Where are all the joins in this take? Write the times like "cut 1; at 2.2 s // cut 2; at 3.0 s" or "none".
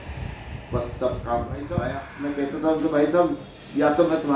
cut 1; at 2.0 s